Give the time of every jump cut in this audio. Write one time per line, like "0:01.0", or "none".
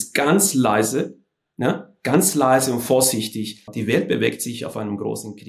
0:03.7